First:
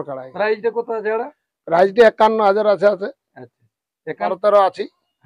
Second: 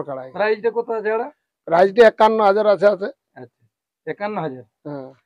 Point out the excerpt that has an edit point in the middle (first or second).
first